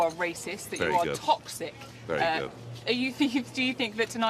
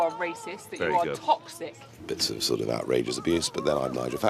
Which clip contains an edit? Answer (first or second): second